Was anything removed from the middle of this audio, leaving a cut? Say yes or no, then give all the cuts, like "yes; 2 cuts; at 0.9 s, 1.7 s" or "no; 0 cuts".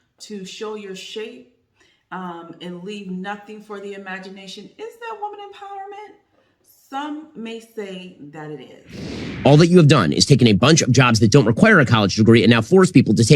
yes; 1 cut; at 9.2 s